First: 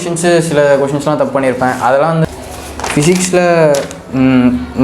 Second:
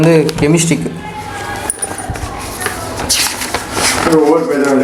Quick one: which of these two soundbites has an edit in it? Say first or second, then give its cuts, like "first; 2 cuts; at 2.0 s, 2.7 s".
first; 1 cut; at 2.2 s